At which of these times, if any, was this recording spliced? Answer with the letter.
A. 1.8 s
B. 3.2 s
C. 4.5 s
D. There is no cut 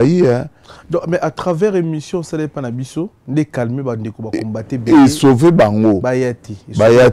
B